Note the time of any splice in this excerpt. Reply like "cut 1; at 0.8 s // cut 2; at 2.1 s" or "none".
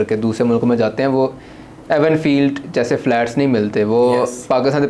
none